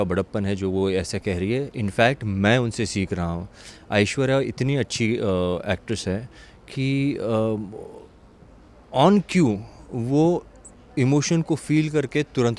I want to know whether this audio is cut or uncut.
uncut